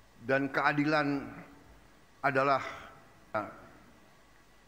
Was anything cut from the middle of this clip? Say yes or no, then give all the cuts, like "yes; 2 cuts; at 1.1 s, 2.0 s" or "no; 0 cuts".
yes; 1 cut; at 3.4 s